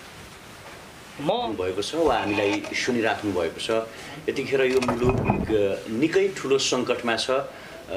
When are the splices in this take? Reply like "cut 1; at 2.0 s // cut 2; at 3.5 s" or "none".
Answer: cut 1; at 1.5 s